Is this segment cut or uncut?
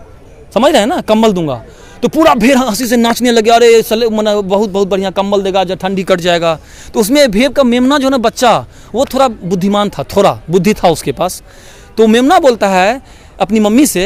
uncut